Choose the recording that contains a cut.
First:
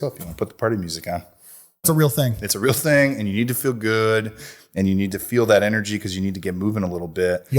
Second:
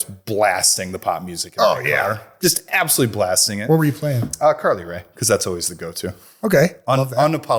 first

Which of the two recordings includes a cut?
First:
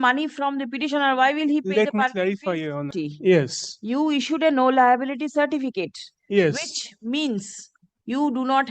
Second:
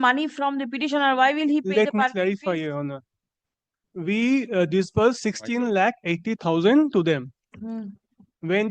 first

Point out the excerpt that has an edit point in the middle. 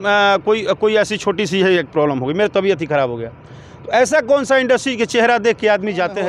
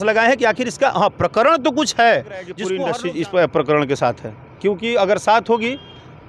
second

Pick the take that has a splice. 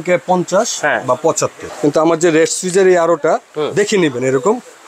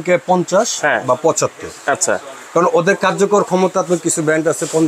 first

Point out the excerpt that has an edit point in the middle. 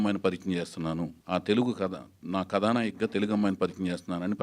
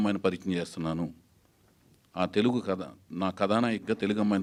first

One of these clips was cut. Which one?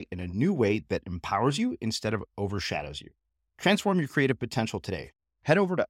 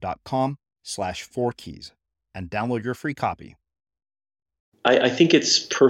second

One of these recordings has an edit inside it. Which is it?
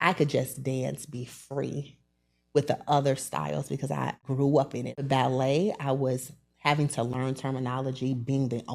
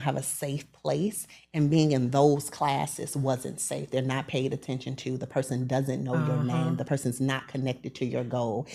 first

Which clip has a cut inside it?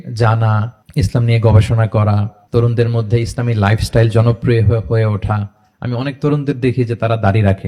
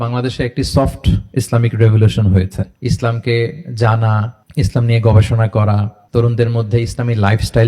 second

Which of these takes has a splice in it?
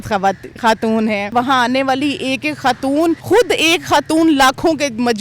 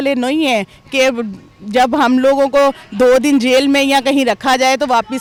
first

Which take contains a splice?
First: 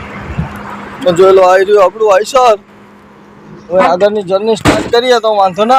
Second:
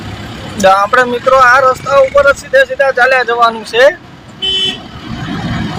first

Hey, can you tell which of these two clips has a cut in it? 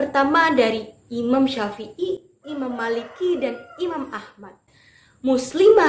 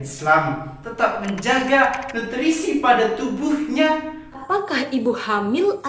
second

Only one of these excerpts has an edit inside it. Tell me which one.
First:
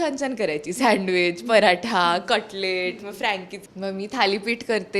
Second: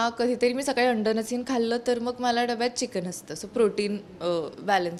first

